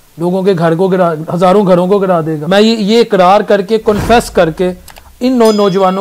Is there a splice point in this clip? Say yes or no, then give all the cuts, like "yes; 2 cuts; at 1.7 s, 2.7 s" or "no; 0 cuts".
yes; 1 cut; at 2.3 s